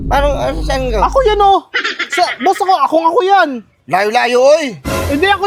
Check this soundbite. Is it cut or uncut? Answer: uncut